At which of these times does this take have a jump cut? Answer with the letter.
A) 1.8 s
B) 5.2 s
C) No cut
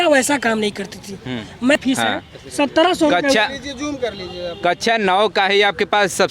A